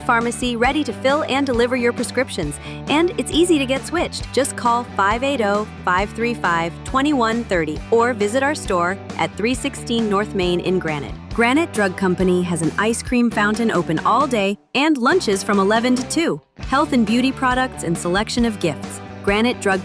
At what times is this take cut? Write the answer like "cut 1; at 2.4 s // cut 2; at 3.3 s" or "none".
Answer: none